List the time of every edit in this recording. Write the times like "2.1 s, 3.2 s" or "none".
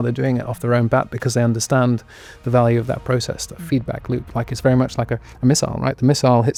none